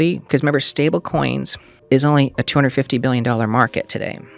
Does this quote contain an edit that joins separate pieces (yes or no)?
no